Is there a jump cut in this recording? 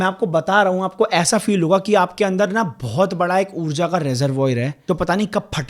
yes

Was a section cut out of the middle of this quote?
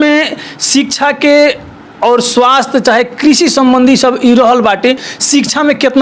yes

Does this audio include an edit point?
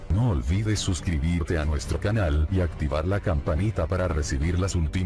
no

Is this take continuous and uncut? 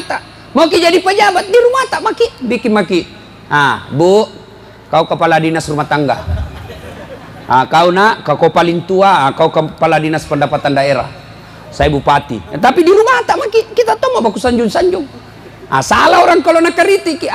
yes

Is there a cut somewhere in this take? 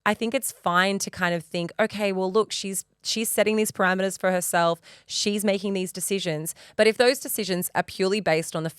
no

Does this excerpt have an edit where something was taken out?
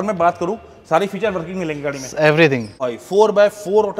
yes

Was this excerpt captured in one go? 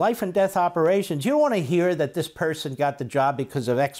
yes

